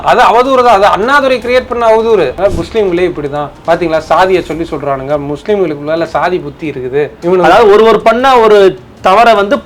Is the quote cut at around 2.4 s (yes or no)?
yes